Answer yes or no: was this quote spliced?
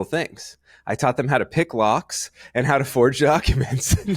no